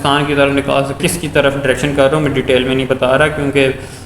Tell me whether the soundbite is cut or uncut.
cut